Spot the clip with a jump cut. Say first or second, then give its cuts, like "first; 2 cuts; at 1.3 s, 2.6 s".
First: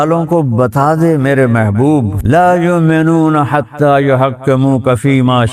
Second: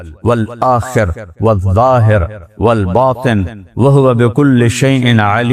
first; 1 cut; at 2.1 s